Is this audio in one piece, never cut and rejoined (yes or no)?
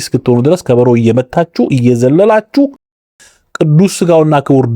no